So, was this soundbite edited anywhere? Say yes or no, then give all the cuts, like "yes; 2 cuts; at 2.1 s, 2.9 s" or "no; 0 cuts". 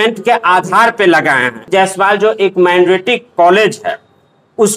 yes; 1 cut; at 1.6 s